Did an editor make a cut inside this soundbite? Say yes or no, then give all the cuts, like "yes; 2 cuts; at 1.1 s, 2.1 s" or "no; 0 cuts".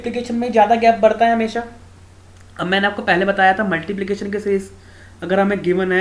no; 0 cuts